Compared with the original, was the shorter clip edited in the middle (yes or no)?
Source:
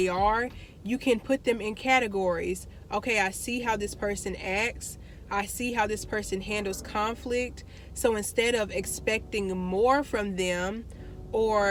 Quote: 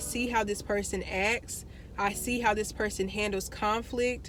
no